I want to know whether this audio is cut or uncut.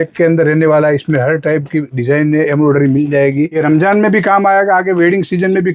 cut